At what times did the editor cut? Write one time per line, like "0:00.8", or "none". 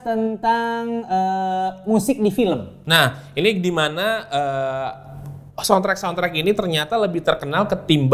none